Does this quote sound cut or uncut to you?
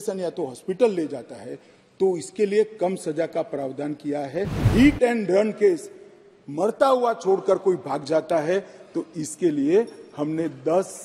cut